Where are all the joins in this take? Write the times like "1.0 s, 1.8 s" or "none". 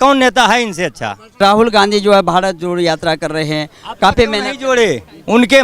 1.3 s